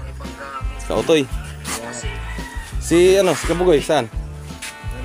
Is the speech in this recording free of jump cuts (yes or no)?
yes